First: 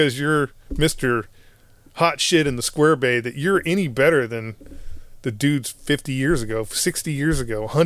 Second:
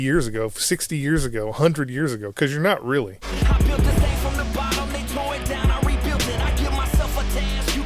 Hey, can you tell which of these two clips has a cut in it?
second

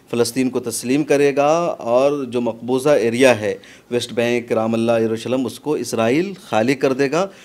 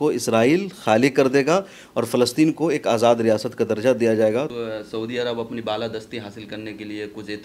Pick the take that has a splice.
second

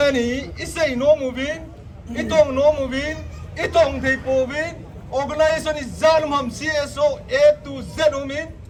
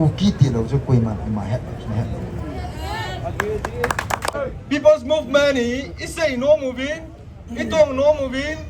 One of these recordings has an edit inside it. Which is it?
second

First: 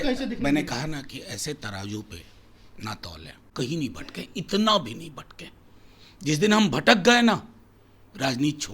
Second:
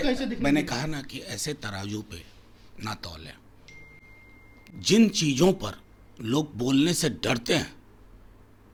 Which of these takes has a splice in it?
first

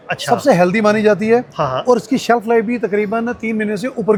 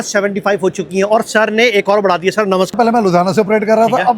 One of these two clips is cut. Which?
second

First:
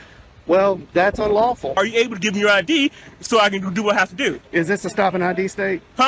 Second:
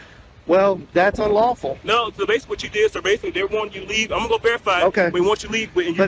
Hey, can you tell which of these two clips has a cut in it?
first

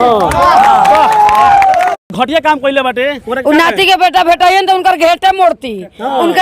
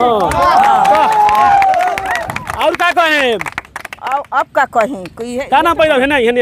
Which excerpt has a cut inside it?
first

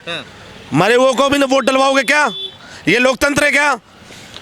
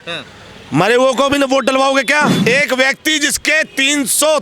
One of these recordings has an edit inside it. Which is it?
second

